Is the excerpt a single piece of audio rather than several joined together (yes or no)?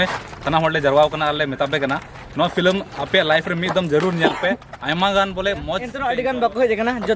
no